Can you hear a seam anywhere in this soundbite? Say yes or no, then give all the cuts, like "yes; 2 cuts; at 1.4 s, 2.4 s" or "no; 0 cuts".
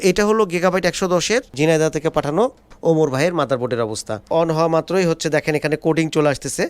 yes; 2 cuts; at 1.5 s, 4.3 s